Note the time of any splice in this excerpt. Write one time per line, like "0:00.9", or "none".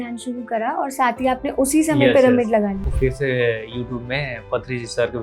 0:02.8